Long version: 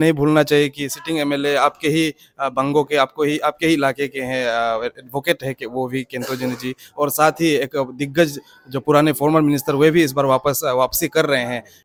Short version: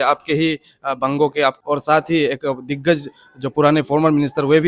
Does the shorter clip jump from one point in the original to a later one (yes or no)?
yes